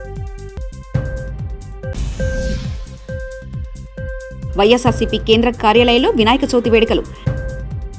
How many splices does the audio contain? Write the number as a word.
zero